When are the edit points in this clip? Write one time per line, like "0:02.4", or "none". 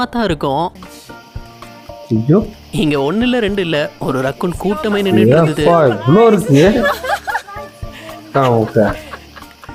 none